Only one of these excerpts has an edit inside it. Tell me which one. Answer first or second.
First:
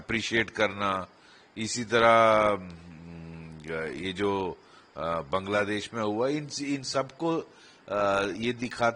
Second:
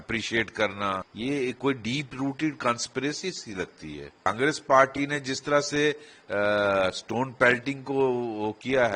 second